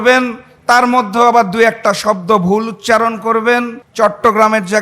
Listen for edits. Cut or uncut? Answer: cut